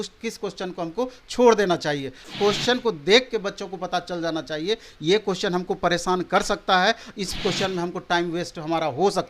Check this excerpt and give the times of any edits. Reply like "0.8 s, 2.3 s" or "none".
2.3 s